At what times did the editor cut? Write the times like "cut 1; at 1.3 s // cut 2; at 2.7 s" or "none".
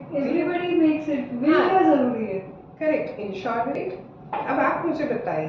cut 1; at 3.7 s